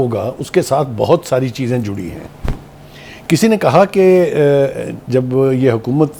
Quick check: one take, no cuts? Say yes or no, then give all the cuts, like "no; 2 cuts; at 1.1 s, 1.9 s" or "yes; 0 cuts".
yes; 0 cuts